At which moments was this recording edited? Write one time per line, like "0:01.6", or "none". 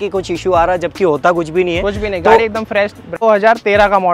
0:03.1